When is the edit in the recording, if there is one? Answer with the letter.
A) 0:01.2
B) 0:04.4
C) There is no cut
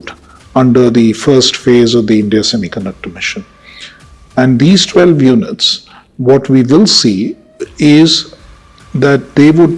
C